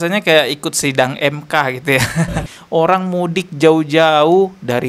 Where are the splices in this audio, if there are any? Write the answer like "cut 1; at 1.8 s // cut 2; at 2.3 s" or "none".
cut 1; at 2.5 s